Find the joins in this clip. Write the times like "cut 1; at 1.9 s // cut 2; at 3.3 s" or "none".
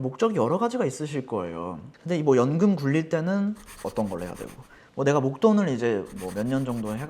cut 1; at 1.9 s